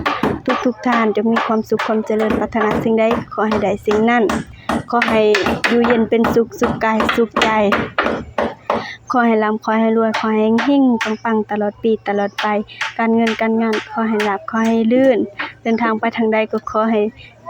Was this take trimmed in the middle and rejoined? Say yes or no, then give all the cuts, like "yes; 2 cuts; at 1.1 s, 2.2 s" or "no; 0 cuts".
no; 0 cuts